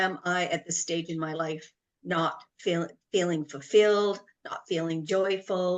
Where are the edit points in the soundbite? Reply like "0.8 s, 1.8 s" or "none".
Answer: none